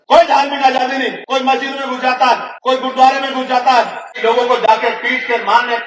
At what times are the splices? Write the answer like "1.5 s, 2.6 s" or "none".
1.2 s, 2.5 s, 4.0 s